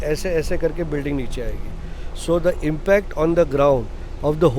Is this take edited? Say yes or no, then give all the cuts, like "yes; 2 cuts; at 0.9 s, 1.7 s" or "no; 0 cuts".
no; 0 cuts